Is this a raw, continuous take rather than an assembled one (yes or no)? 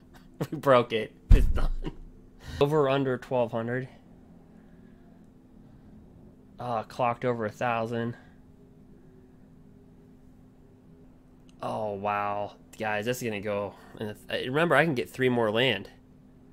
no